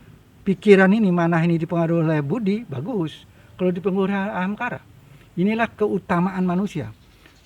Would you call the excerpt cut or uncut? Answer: uncut